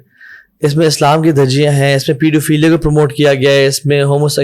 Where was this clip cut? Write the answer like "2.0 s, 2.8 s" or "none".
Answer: none